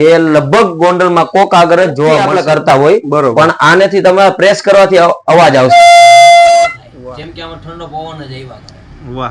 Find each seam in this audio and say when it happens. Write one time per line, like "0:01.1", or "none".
0:02.6
0:06.6